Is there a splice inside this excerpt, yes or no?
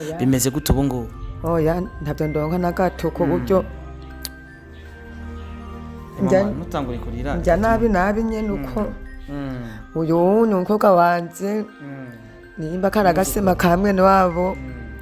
yes